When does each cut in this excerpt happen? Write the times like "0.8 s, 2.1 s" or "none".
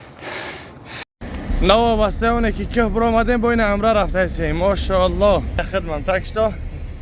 1.0 s